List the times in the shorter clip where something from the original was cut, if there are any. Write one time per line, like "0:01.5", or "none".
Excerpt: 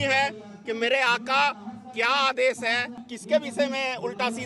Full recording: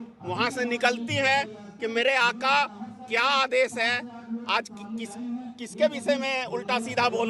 0:03.0